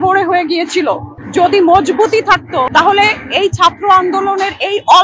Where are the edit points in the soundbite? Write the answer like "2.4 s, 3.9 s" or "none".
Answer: 1.1 s, 2.7 s